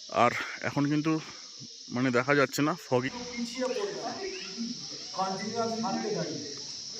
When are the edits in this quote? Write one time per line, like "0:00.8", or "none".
0:03.1